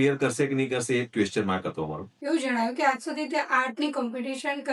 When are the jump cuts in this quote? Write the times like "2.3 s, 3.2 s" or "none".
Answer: 2.1 s

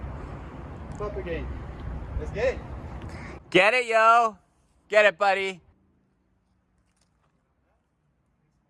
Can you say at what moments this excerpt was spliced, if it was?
none

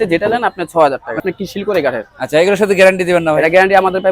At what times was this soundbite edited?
1.2 s

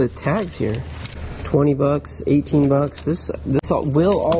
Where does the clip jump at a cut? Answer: none

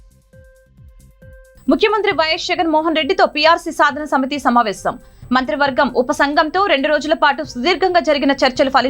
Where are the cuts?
1.5 s

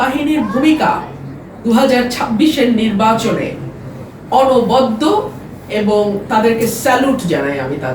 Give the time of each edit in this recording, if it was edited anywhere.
none

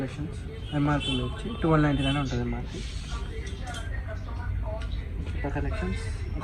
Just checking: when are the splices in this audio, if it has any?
none

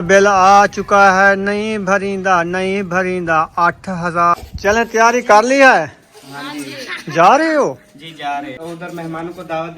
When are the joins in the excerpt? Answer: 4.3 s, 8.6 s

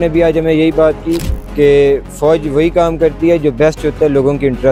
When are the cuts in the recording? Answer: none

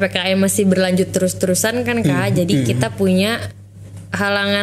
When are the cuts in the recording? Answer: none

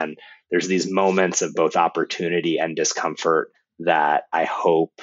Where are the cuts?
3.5 s

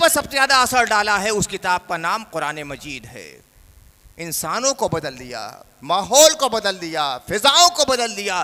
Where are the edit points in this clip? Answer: none

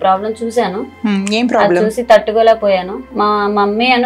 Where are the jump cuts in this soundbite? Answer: 3.0 s

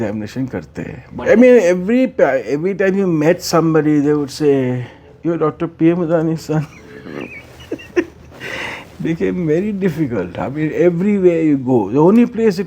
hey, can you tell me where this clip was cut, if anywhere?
1.1 s

